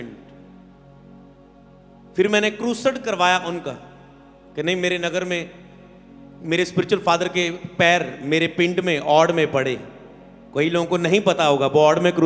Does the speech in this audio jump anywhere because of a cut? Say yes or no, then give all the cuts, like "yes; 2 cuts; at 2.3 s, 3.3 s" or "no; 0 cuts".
no; 0 cuts